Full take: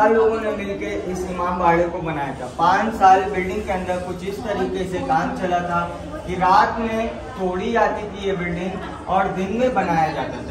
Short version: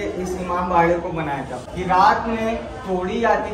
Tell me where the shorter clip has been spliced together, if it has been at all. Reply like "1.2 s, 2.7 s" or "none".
1.5 s